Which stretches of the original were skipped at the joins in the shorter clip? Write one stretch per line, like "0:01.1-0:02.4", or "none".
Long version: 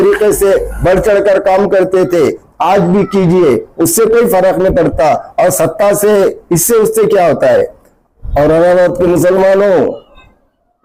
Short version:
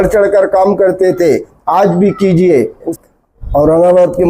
0:03.9-0:07.7

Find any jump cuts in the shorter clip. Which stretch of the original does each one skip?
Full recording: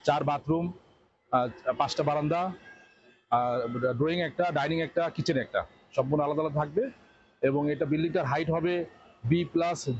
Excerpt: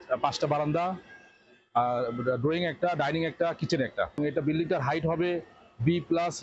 0:05.7-0:07.6

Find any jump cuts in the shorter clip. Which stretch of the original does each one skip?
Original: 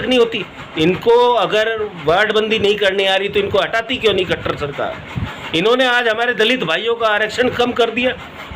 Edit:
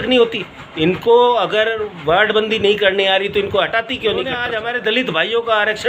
0:04.4-0:05.9

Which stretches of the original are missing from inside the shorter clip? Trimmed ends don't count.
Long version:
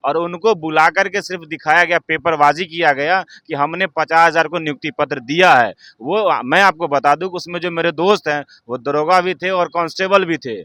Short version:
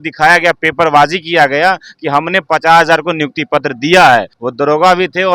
0:05.9-0:08.7

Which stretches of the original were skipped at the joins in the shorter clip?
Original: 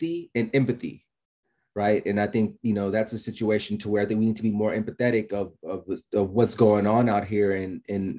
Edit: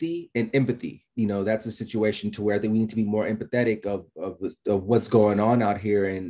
0:01.1-0:02.6

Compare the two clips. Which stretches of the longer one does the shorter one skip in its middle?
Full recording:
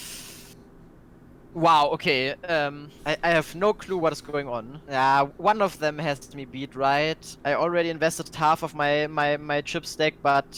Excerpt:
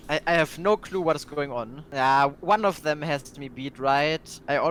none

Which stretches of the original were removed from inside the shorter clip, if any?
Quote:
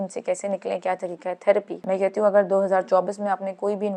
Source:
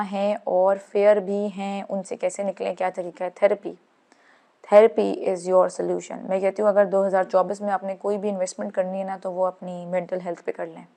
0:03.7-0:06.2

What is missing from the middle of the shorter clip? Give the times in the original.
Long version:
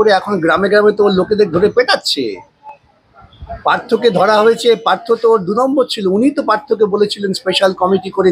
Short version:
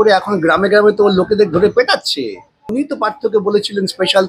0:02.7-0:06.2

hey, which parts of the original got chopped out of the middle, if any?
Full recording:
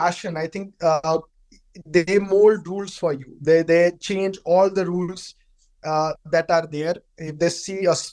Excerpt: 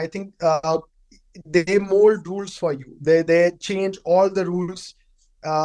none

